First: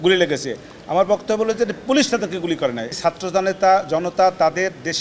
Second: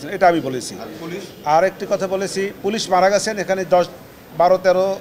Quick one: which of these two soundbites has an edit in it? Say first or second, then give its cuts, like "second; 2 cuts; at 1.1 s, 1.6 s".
first; 1 cut; at 3.0 s